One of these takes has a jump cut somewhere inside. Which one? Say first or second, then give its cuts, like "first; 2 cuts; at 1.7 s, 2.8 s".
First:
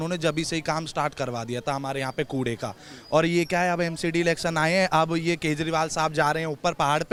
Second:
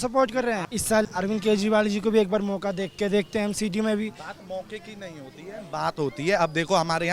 second; 1 cut; at 1.0 s